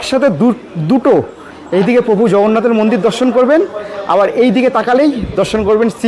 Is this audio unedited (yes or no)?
yes